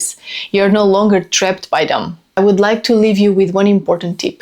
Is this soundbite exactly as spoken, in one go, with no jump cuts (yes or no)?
no